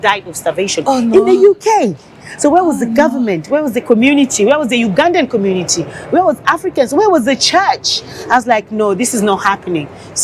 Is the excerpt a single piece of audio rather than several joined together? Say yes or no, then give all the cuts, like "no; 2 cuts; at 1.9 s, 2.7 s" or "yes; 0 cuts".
yes; 0 cuts